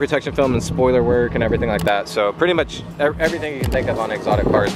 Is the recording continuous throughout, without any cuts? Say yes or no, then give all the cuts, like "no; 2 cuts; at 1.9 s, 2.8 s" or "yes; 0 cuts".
yes; 0 cuts